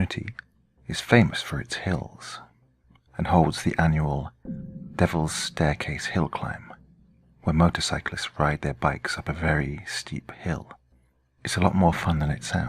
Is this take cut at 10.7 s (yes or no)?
yes